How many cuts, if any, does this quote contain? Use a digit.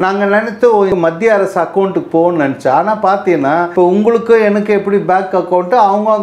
2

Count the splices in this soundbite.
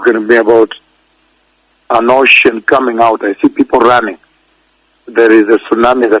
1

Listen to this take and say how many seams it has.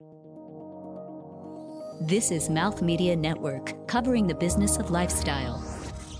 0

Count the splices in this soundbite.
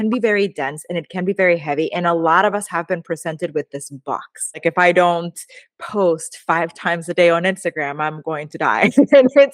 1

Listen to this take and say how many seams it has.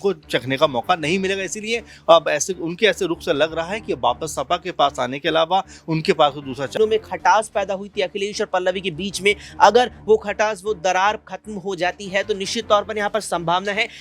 1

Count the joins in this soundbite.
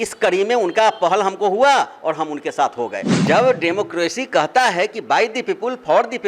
1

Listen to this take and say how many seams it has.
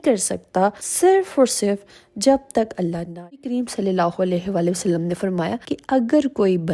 1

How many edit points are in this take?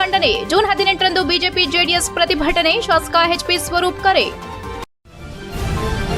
1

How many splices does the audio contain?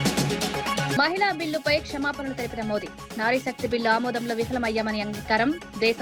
1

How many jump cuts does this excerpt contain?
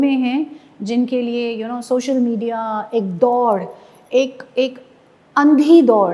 0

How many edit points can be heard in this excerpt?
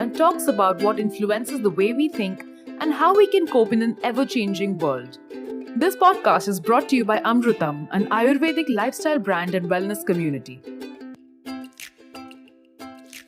1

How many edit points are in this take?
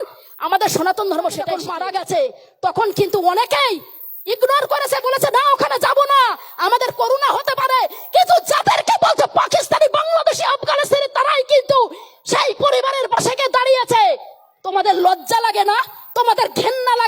1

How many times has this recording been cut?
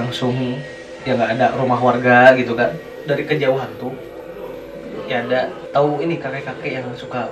2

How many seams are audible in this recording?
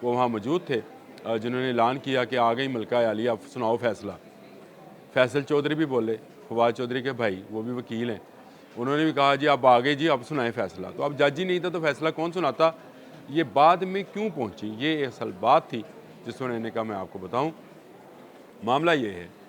0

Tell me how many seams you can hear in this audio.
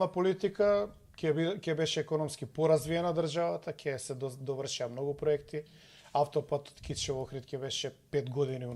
0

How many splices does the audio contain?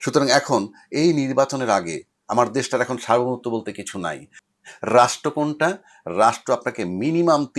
1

